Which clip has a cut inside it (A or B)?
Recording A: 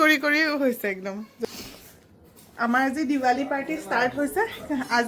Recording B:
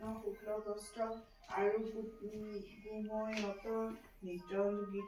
A